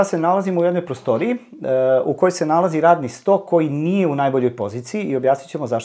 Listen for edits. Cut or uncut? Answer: uncut